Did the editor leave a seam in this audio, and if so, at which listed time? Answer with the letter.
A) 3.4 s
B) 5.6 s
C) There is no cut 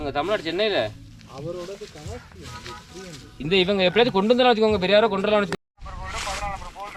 C